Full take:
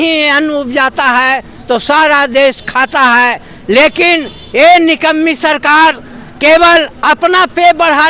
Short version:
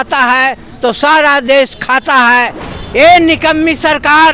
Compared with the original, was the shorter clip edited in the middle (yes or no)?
yes